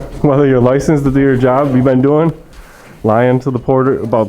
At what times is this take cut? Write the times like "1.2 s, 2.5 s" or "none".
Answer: none